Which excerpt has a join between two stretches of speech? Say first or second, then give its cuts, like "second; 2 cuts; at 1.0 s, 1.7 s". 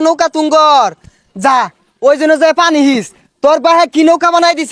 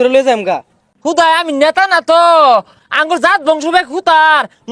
second; 1 cut; at 0.9 s